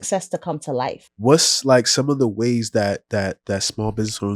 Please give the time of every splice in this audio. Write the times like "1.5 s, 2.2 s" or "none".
1.0 s